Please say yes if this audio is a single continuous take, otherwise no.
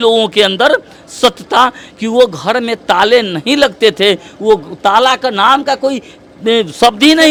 yes